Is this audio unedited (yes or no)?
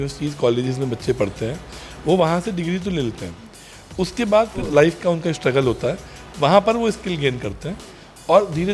no